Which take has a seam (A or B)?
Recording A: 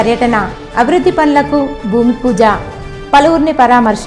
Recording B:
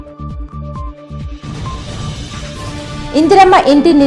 B